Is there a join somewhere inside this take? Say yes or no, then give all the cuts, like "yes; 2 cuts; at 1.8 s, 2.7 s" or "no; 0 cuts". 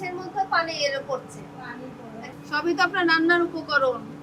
yes; 1 cut; at 2.3 s